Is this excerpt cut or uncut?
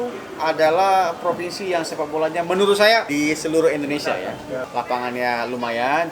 cut